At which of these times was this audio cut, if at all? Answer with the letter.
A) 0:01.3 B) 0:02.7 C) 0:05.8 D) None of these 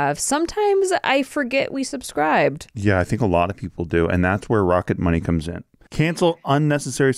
C